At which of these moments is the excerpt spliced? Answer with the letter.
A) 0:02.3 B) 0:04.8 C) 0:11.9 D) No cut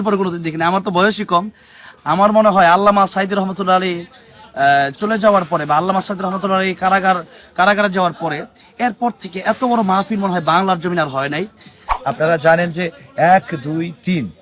C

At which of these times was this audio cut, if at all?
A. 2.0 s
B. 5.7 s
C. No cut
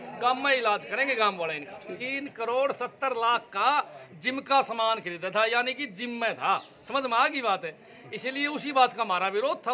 A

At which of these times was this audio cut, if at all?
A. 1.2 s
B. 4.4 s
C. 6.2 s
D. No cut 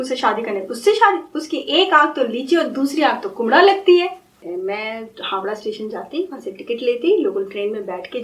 B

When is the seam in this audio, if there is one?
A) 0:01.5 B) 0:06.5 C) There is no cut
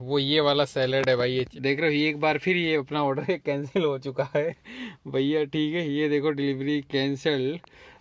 A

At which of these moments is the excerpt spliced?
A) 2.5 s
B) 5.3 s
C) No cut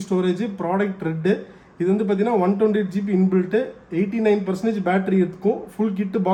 C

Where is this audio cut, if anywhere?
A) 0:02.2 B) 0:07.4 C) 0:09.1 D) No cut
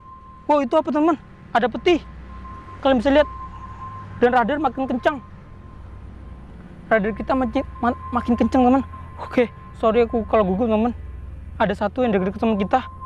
D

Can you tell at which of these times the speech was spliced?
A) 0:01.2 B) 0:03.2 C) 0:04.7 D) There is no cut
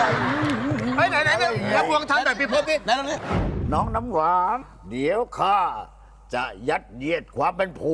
B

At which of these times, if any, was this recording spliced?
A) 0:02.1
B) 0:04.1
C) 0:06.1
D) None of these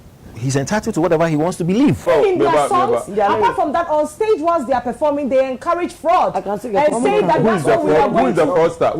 A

